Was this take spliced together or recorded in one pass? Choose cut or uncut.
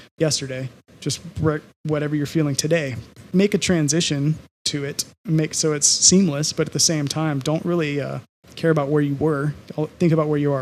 uncut